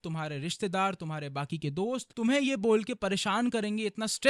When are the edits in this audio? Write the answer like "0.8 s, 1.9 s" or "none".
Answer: 2.1 s